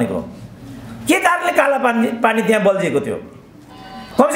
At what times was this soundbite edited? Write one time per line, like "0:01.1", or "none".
none